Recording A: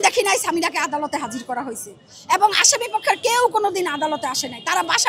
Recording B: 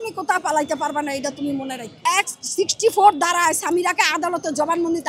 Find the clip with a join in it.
B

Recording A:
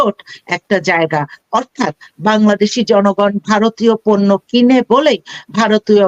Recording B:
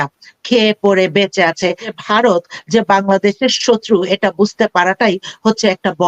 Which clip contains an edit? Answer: B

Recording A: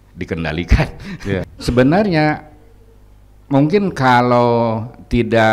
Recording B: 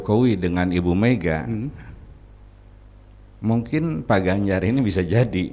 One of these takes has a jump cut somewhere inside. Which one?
A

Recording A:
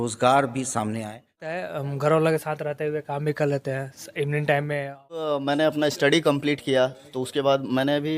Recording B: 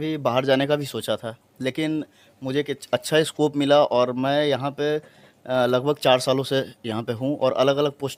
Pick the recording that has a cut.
A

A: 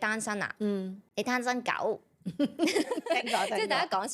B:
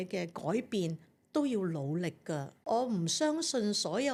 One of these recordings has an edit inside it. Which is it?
A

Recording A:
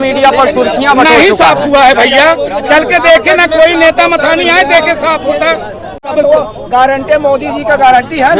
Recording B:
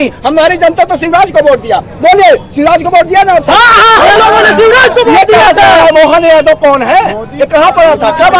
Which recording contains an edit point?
A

